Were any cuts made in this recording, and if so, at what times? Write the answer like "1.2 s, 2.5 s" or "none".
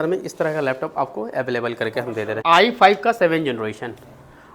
2.4 s